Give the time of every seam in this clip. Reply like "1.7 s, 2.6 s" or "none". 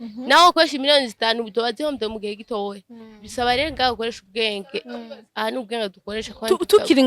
none